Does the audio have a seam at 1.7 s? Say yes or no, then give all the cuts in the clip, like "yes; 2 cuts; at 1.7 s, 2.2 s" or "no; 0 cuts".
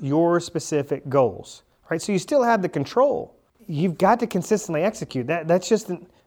no; 1 cut; at 3.4 s